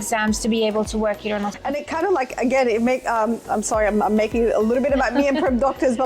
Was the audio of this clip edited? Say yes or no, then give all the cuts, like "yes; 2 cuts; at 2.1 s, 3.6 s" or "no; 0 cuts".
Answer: yes; 1 cut; at 1.6 s